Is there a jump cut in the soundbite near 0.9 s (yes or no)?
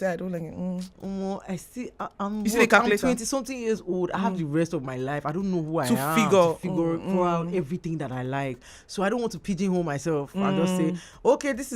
yes